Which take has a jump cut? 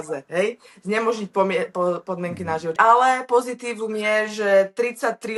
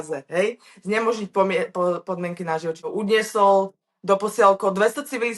second; 1 cut; at 2.7 s

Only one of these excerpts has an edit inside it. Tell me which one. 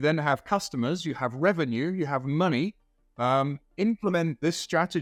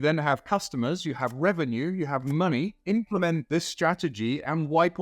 second; 1 cut; at 2.8 s

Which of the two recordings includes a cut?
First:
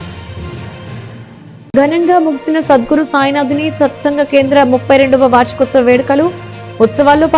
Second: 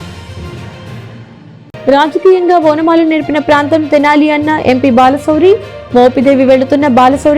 first; 1 cut; at 1.1 s

